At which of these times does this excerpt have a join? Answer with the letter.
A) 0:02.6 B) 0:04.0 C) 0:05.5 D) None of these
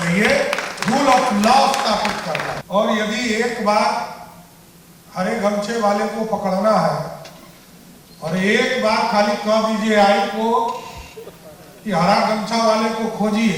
A